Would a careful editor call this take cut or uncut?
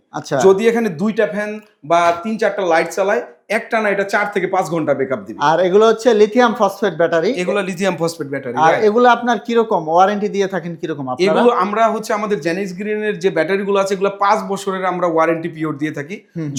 uncut